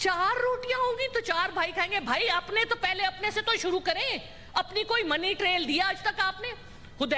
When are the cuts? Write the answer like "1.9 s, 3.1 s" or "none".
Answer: none